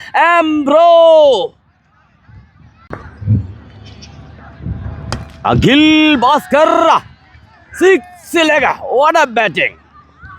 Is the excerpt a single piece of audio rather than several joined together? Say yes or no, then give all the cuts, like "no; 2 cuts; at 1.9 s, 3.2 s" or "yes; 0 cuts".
no; 1 cut; at 3.1 s